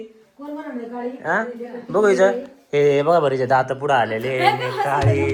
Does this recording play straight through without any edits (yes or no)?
yes